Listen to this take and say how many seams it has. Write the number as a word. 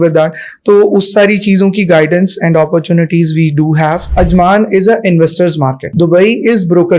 two